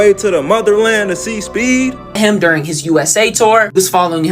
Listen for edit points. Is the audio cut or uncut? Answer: cut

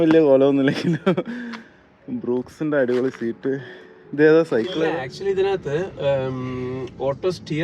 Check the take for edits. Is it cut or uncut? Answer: cut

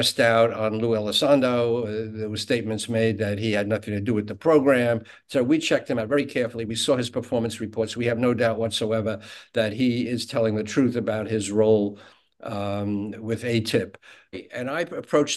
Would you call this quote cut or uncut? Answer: cut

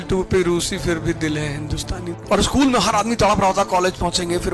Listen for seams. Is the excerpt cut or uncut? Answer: cut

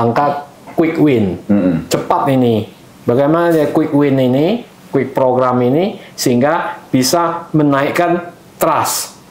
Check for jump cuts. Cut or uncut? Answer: uncut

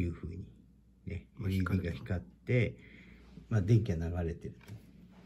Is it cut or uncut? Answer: uncut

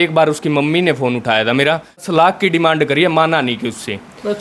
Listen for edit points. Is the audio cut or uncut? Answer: cut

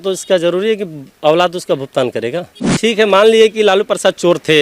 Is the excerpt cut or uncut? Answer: cut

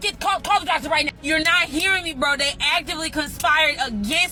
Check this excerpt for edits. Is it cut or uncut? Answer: uncut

